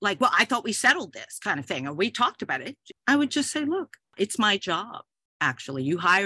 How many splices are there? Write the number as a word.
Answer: two